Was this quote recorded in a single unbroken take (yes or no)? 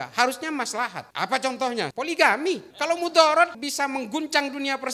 no